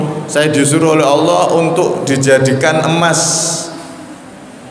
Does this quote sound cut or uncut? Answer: uncut